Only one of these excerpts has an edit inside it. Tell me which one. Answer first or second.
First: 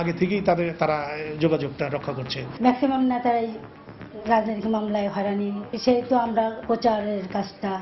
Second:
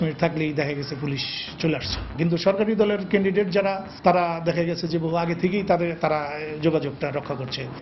first